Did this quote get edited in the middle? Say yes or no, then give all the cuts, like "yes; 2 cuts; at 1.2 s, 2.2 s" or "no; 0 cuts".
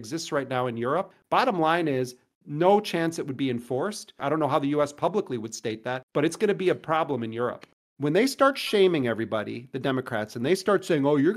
yes; 3 cuts; at 1.1 s, 4.2 s, 7.7 s